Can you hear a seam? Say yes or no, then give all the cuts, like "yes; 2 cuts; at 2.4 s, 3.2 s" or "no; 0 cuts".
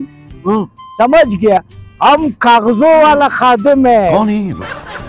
no; 0 cuts